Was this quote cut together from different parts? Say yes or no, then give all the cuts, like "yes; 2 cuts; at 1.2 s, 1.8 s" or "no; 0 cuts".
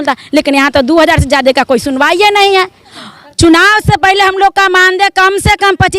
yes; 1 cut; at 2.9 s